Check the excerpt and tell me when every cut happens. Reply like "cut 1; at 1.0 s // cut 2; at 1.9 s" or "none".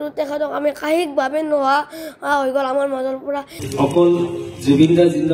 cut 1; at 3.6 s